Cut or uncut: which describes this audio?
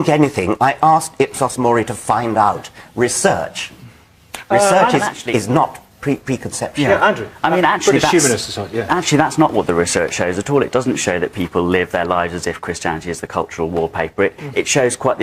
cut